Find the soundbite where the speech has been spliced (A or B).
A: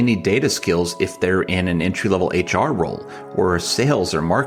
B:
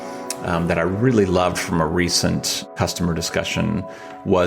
B